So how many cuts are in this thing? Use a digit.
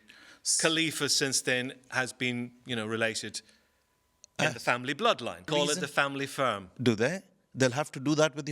1